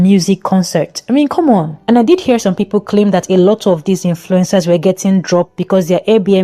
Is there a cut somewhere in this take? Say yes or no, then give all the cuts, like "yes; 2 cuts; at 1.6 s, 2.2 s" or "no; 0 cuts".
no; 0 cuts